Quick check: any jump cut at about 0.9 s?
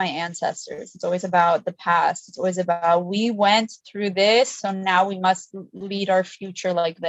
no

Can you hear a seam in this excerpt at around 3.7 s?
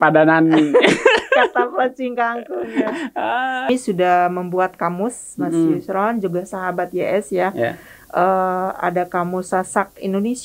yes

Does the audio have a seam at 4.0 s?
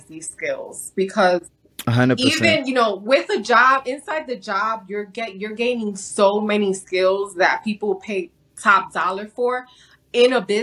no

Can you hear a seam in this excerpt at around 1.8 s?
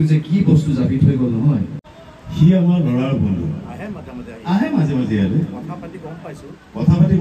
yes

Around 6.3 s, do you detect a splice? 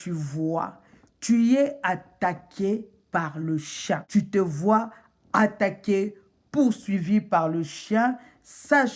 no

